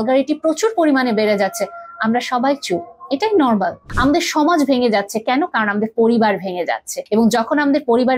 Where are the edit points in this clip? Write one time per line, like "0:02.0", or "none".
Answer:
0:03.8
0:06.9